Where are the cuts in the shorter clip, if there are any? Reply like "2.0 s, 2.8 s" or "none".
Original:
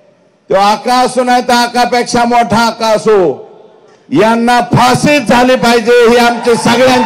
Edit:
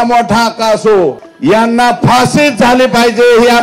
1.3 s

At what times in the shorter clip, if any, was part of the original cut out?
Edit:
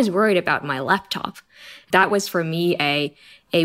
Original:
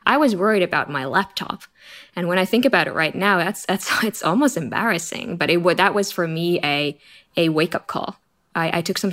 2.0 s

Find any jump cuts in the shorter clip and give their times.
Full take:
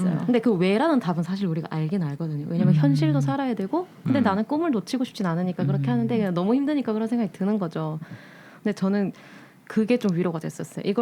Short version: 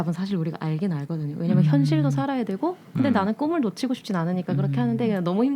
none

